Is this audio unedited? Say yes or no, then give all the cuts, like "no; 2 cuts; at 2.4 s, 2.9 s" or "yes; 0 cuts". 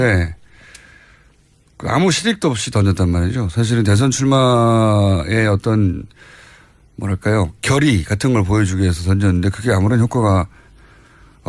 yes; 0 cuts